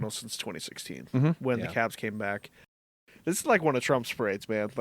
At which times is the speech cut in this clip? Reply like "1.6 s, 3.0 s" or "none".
2.9 s